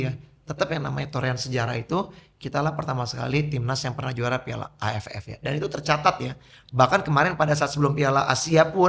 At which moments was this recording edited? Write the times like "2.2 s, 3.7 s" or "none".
none